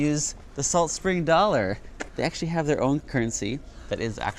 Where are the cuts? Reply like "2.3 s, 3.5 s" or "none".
3.0 s